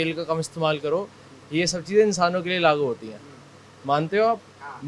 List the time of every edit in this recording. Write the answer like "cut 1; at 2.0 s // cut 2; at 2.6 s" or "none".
none